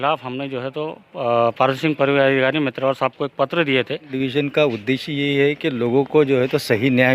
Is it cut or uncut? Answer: cut